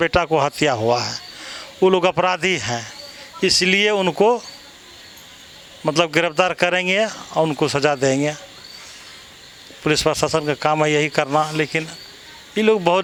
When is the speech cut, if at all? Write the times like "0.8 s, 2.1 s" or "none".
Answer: none